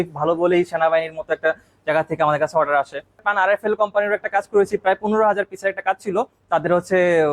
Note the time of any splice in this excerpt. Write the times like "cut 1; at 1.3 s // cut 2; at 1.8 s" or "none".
cut 1; at 3.2 s

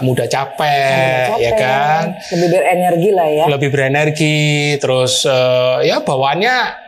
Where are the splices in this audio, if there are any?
none

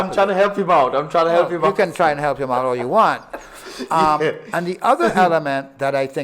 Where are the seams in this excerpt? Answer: none

